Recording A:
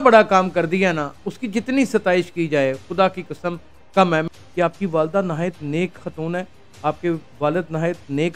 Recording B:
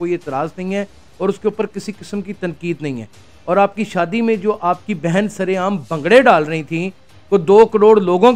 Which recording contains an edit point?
A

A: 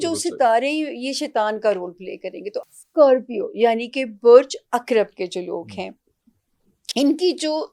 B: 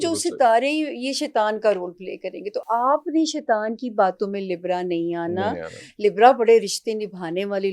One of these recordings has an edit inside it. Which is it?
A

